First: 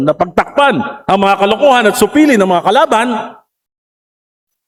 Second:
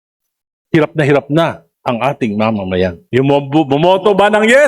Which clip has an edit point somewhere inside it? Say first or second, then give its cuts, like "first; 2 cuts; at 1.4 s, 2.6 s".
second; 1 cut; at 3.0 s